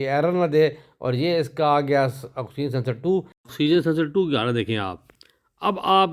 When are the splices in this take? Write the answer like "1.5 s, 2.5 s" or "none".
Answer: none

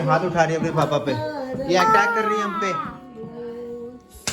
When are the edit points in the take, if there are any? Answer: none

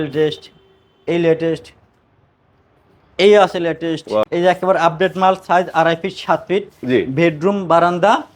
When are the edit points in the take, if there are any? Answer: 4.2 s

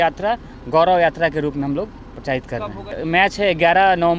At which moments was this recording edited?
3.0 s

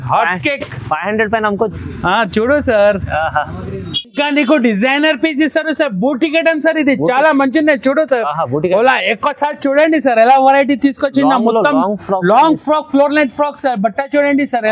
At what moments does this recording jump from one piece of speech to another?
none

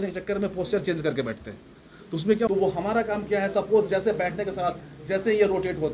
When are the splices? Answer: 2.5 s

